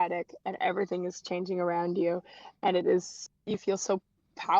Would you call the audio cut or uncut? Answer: cut